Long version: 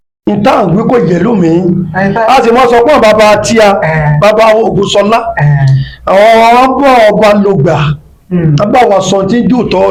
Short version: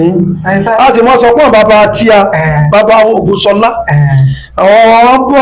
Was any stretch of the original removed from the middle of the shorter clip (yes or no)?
no